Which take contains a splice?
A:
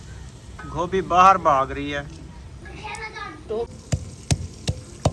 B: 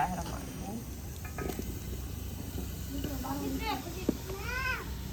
A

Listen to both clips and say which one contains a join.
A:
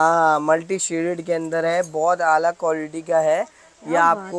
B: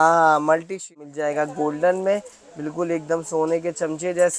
B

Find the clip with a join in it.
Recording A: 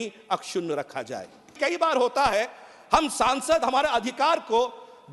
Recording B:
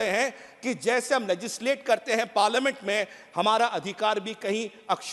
A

